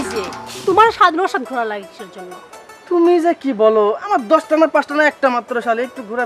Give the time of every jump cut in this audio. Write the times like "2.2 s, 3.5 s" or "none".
none